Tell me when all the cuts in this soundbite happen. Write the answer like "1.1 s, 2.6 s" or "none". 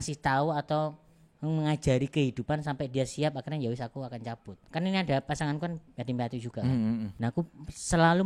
4.6 s, 7.1 s